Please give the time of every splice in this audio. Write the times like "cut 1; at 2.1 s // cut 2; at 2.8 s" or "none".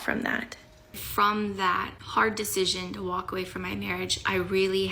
cut 1; at 1.0 s